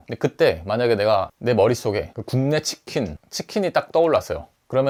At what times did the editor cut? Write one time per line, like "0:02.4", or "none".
none